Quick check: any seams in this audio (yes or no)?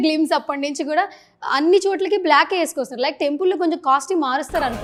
no